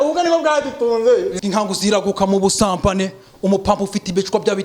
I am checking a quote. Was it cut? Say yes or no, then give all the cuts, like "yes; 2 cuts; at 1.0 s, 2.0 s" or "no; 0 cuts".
yes; 1 cut; at 1.4 s